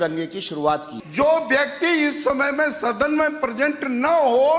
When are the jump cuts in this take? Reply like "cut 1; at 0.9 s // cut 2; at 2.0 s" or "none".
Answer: cut 1; at 1.0 s